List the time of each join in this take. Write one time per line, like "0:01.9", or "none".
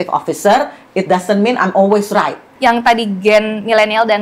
0:02.4